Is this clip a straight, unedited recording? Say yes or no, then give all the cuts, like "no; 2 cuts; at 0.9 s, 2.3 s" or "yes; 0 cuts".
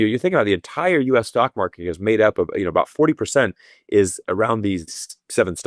yes; 0 cuts